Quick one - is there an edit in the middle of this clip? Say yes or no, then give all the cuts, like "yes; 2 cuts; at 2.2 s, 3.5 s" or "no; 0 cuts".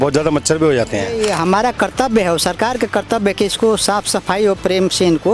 yes; 1 cut; at 1.1 s